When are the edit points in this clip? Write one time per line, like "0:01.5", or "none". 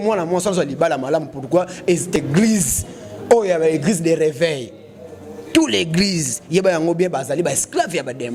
none